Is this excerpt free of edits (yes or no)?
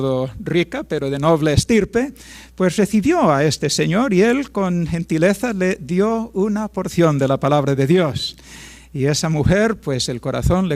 yes